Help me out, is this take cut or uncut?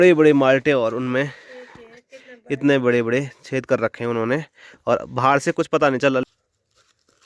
cut